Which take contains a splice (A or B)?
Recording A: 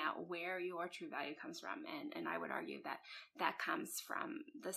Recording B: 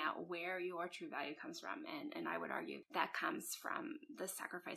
B